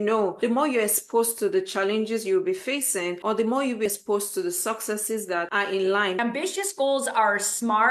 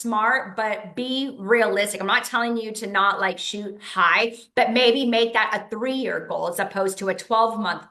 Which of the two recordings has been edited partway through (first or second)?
first